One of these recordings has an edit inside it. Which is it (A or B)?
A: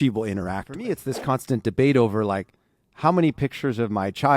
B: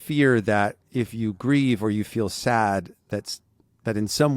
A